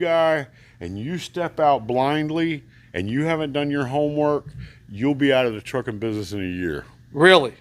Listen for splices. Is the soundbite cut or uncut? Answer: uncut